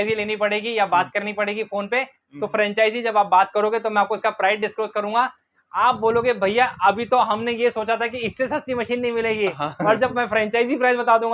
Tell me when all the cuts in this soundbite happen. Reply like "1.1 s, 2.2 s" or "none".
none